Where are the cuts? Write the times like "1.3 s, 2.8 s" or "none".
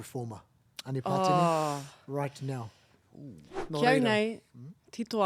3.6 s